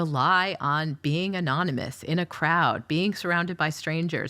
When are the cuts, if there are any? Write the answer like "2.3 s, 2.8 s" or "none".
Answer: none